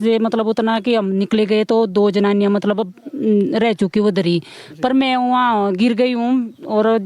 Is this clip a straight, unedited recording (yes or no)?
yes